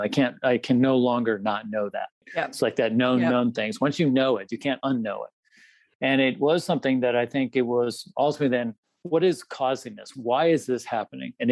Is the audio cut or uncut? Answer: cut